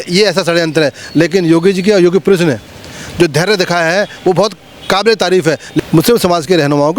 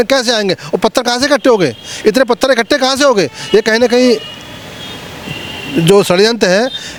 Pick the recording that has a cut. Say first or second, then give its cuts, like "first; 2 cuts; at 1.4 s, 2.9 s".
first; 1 cut; at 5.8 s